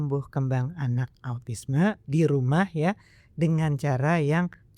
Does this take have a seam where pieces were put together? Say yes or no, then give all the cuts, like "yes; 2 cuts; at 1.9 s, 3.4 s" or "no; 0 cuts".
no; 0 cuts